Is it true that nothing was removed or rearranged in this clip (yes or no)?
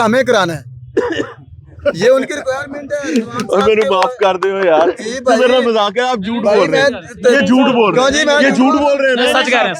yes